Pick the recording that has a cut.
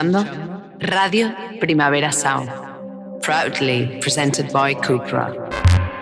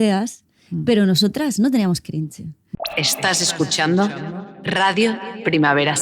second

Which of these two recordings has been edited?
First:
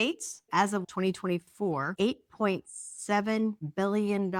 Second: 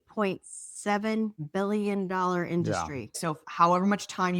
second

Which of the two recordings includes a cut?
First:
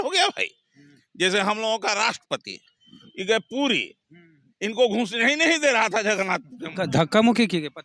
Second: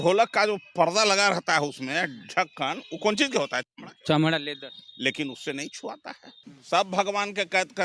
second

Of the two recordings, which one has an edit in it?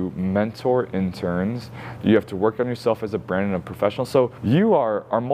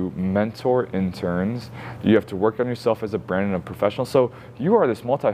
first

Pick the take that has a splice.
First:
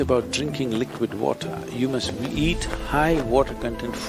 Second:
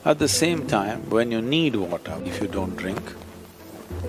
second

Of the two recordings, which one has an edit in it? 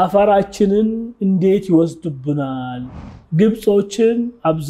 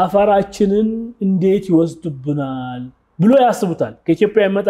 first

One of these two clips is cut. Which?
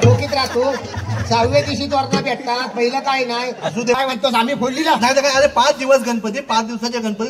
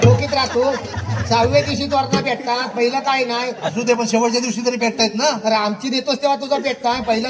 first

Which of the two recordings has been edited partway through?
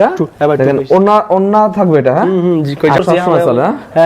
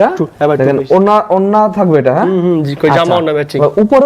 first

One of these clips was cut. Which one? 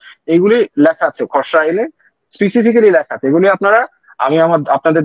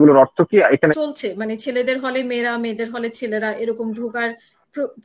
second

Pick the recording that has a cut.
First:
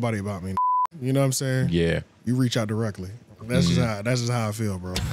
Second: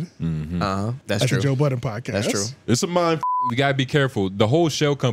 second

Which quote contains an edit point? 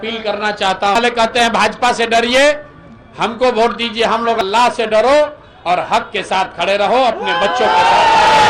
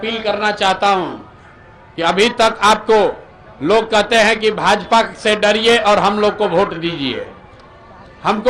first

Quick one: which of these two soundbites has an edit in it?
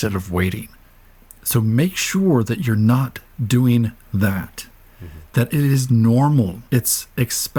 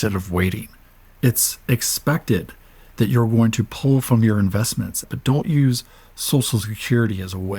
second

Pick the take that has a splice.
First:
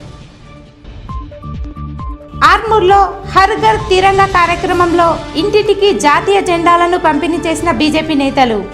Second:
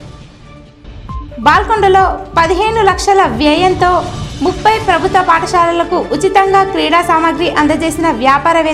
second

